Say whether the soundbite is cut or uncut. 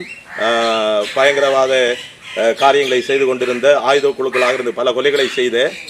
uncut